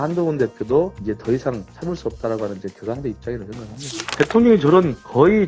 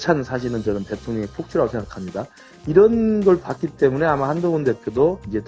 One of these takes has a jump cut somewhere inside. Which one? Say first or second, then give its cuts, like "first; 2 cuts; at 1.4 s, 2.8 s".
first; 1 cut; at 4.1 s